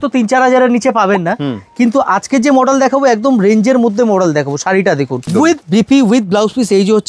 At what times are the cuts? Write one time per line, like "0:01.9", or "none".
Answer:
0:05.3